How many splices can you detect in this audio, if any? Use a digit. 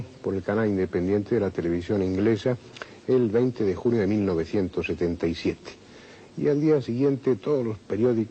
1